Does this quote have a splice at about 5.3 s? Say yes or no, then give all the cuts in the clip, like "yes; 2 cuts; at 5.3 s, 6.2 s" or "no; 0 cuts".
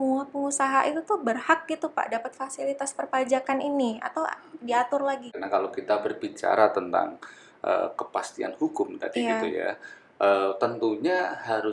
yes; 1 cut; at 5.3 s